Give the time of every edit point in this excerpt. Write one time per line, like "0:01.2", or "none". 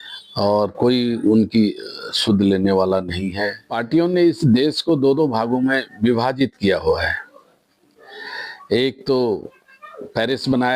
0:03.8